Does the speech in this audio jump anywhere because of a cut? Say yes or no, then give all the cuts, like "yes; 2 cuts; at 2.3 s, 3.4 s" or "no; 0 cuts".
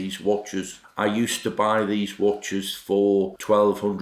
no; 0 cuts